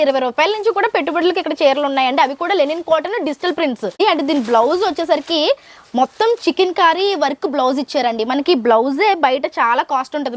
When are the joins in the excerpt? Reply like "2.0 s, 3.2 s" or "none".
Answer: 4.0 s